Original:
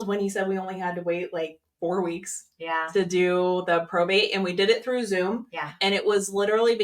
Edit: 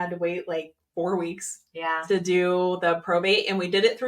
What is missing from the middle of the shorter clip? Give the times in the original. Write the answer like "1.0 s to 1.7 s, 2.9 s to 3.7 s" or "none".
none